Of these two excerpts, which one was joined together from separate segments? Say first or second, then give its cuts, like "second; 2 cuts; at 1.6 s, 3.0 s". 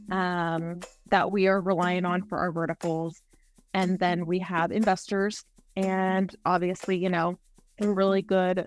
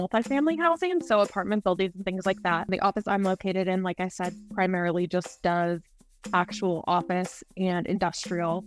second; 1 cut; at 2.7 s